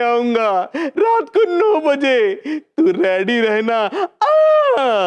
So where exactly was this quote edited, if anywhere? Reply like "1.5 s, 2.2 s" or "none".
none